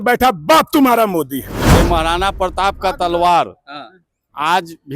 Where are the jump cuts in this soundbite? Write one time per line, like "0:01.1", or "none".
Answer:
0:01.6